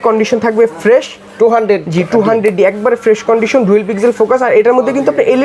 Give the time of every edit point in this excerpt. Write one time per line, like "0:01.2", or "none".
none